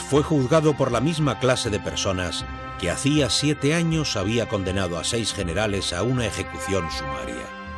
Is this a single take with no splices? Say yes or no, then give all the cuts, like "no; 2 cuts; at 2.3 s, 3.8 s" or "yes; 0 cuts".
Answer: yes; 0 cuts